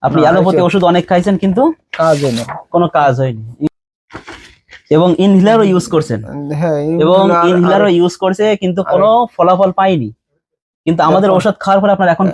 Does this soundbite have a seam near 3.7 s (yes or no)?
yes